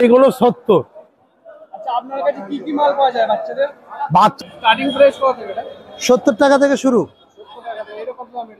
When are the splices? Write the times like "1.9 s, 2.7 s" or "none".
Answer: 4.3 s